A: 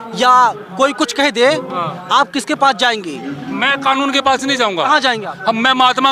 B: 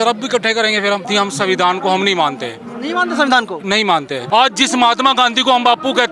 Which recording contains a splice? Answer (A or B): B